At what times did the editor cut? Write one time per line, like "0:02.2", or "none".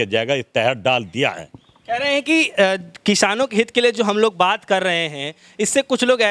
none

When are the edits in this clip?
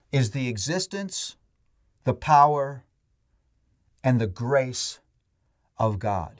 none

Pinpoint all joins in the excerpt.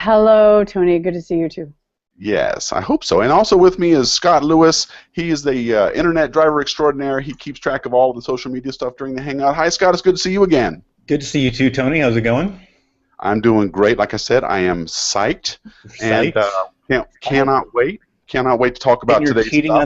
0:07.6

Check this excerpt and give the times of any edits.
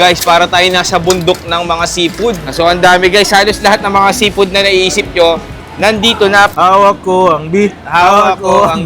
0:02.5
0:06.5

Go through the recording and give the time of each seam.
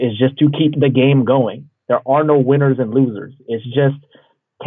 none

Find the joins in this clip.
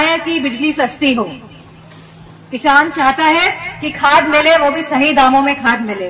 none

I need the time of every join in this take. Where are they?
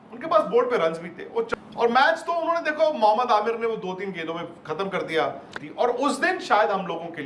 0:01.5
0:05.6

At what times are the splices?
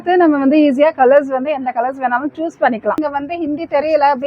0:03.0

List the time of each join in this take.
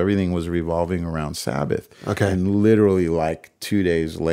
0:02.3

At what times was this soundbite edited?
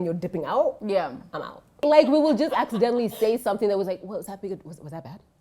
0:01.8

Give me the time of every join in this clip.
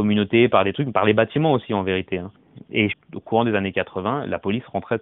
0:02.8

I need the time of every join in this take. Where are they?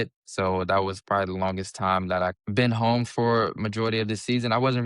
0:02.4

